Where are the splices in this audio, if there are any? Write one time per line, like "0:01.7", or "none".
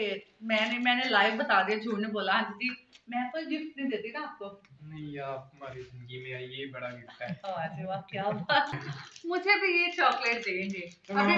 0:08.7